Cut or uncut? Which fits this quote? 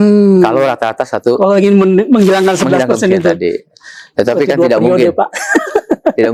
uncut